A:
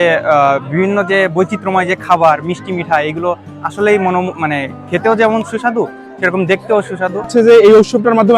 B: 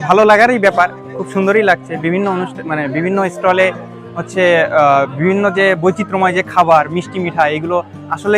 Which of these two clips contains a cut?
A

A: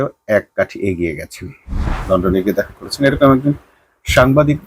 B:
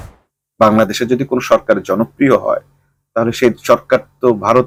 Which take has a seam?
A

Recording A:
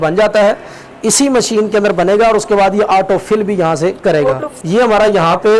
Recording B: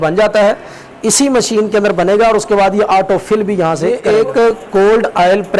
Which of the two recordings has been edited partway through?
B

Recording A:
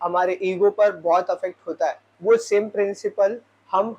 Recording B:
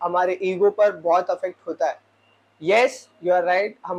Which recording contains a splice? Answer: A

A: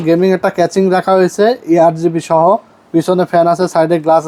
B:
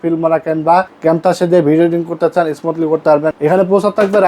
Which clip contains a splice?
B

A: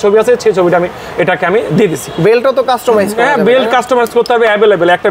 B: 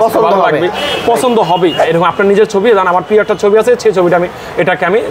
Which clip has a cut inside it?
B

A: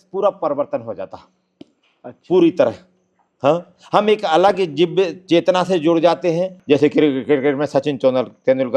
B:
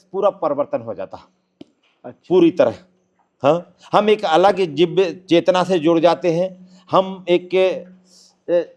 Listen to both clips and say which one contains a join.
A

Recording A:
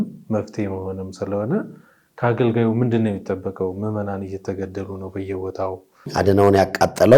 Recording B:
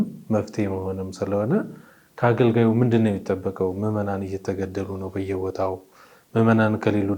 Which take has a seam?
A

